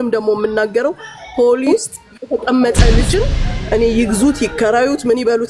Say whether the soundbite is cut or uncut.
cut